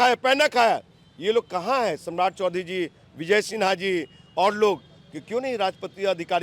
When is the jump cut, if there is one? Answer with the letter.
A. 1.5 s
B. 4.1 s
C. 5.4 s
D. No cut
D